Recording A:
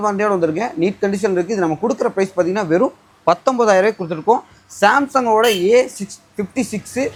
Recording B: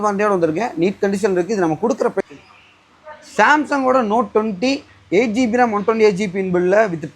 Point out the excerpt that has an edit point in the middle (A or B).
B